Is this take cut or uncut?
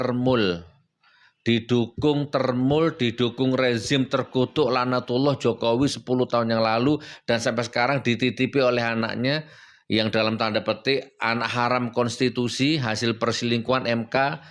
uncut